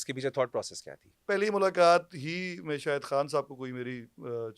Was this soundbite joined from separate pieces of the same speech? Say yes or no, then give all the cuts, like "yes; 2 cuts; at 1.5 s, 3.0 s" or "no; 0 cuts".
yes; 1 cut; at 1.1 s